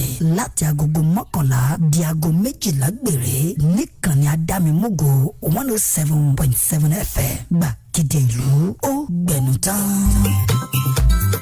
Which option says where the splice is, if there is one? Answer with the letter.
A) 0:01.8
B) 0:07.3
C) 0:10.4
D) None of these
C